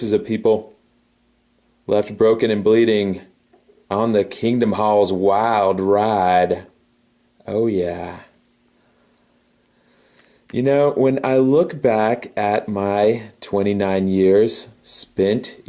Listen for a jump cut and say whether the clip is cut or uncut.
uncut